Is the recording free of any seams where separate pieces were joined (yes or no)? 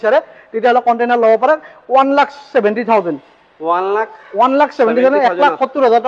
yes